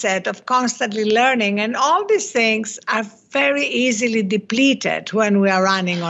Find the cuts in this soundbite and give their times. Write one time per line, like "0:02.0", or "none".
none